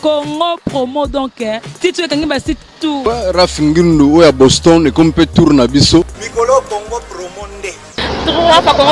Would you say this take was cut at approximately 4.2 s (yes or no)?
no